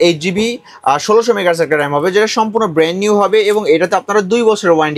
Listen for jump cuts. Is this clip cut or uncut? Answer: uncut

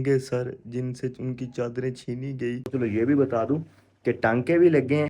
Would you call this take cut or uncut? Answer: cut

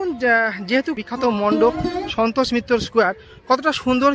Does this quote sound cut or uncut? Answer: cut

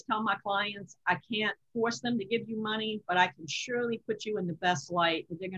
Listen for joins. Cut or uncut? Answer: uncut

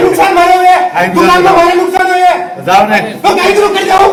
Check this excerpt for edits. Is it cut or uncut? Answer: uncut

